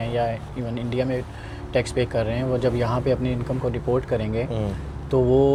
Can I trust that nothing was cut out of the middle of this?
yes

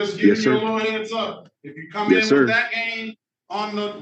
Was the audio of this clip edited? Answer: no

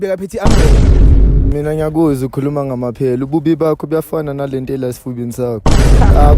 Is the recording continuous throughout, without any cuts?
no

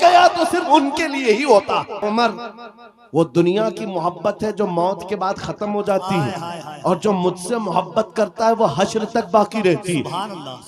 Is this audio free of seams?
no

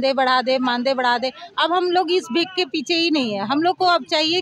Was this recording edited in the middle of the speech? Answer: no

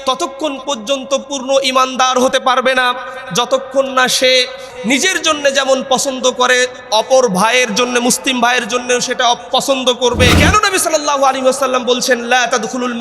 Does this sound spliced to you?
yes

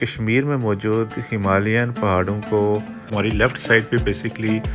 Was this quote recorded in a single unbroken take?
no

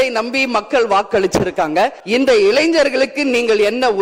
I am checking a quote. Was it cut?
yes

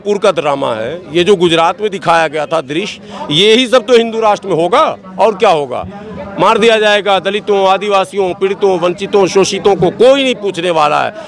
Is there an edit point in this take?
no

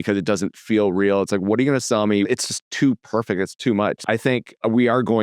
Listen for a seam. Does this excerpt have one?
yes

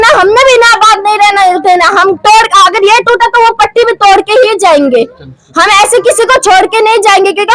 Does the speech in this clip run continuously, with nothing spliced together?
yes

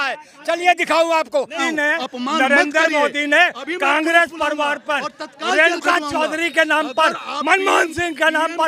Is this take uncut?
no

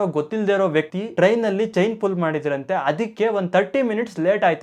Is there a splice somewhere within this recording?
no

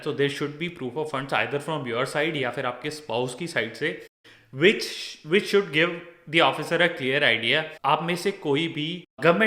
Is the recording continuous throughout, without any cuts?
yes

